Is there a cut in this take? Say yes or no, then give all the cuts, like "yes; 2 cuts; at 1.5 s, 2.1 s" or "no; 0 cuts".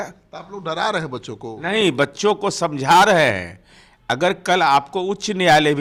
no; 0 cuts